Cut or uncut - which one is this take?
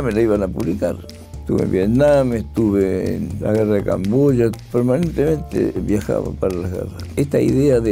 cut